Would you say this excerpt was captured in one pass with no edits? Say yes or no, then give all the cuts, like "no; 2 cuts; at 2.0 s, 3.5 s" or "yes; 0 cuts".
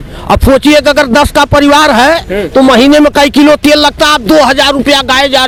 yes; 0 cuts